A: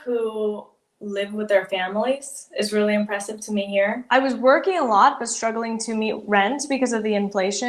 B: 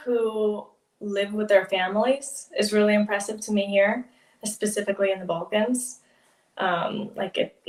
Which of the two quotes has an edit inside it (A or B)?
A